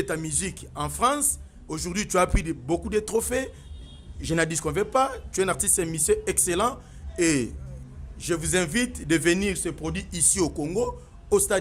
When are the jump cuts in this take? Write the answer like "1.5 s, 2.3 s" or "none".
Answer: none